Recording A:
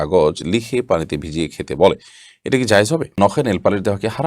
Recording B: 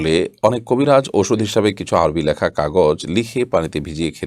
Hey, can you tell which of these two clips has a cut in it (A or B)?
A